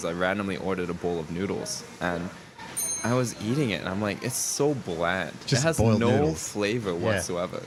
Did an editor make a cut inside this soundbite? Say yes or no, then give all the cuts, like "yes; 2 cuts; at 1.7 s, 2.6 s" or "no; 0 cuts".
no; 0 cuts